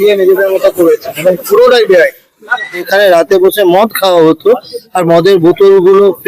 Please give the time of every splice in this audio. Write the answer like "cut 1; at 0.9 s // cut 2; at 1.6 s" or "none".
cut 1; at 2.8 s

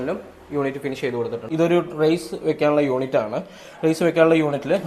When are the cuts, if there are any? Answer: cut 1; at 1.5 s

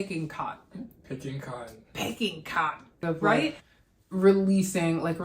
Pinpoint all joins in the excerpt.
cut 1; at 3.6 s

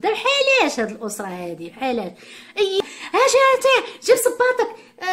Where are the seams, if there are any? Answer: cut 1; at 2.8 s

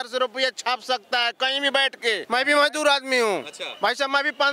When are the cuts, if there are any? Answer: cut 1; at 2.2 s

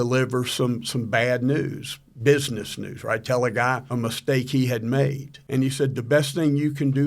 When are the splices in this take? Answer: cut 1; at 3.8 s // cut 2; at 5.3 s

